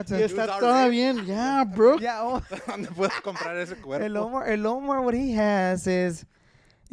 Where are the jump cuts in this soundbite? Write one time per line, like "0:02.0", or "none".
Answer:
none